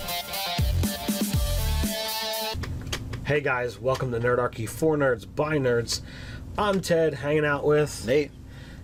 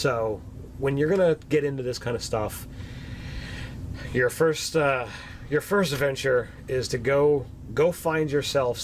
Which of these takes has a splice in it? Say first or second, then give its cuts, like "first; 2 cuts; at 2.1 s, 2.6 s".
second; 1 cut; at 6.6 s